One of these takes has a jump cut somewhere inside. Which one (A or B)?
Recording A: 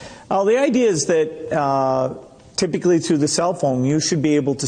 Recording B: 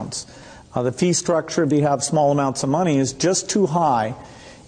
B